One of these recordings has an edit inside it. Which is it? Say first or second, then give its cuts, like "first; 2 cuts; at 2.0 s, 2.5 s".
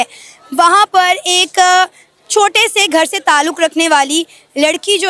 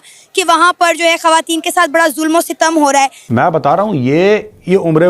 second; 1 cut; at 3.2 s